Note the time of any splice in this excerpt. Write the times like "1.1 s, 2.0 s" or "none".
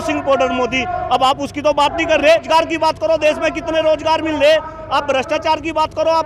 none